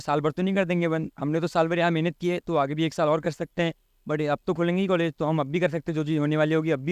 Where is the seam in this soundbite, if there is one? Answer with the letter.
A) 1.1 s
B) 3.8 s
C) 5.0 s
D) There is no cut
D